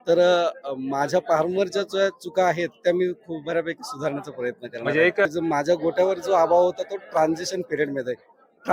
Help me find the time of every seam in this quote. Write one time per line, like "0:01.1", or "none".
0:05.3

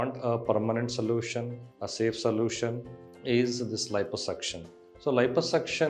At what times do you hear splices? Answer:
none

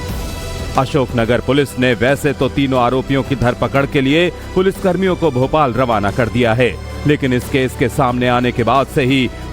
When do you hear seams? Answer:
0:08.1

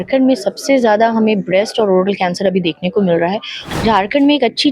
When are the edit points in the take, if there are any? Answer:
0:03.5

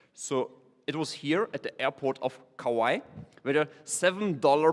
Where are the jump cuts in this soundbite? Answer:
0:03.7

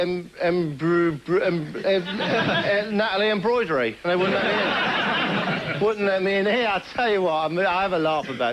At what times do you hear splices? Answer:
0:07.4

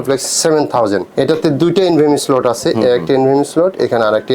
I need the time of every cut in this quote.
0:01.1

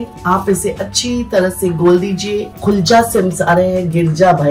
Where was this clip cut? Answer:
0:02.5

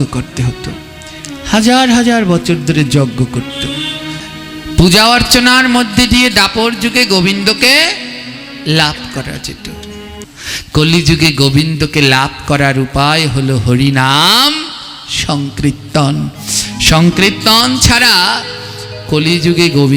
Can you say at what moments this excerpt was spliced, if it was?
0:04.2
0:10.3

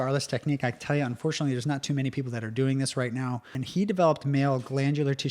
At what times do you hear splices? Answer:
0:03.6

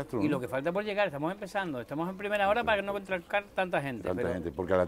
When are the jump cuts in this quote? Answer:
none

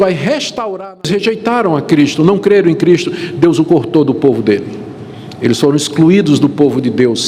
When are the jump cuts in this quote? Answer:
0:00.9

